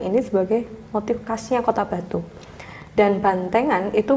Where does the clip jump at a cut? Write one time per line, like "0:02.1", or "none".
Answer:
none